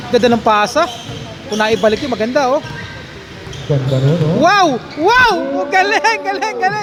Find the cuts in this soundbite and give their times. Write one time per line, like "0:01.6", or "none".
none